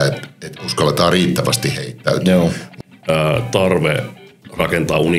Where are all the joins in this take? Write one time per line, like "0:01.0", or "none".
0:02.7